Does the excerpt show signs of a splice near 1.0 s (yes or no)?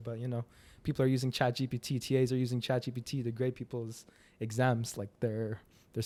no